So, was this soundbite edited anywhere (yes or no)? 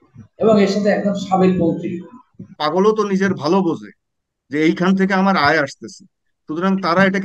yes